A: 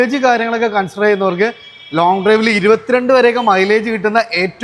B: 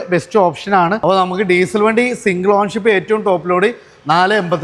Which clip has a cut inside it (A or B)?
B